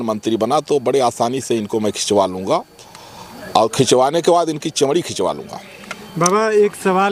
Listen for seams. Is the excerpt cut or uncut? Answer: uncut